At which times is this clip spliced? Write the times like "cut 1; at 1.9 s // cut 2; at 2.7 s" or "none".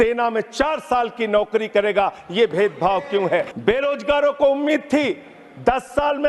cut 1; at 3.5 s